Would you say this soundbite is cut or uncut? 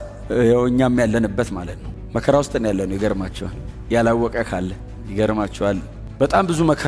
uncut